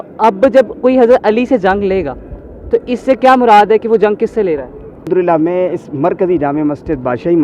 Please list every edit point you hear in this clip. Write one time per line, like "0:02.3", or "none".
0:05.1